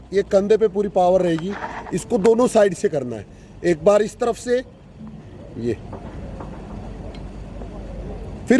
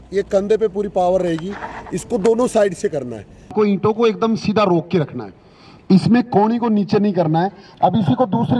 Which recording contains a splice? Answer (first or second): second